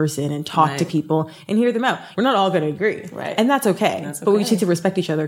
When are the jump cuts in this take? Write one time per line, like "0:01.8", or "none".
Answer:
0:02.1